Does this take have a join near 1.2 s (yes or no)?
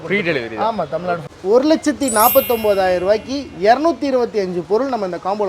yes